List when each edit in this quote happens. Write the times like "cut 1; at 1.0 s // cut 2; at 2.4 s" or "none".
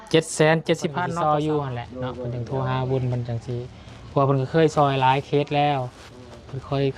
cut 1; at 1.0 s